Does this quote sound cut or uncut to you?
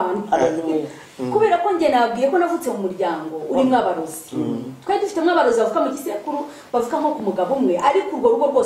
uncut